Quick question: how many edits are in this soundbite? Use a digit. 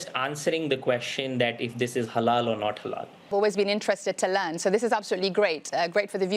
1